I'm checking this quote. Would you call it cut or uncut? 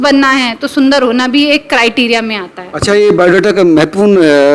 uncut